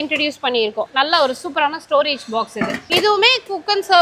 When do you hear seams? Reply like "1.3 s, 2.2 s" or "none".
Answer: 0.8 s, 2.9 s